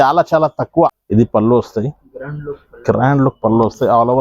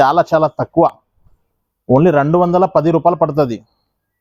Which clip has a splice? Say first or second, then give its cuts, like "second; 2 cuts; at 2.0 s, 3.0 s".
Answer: first; 1 cut; at 1.0 s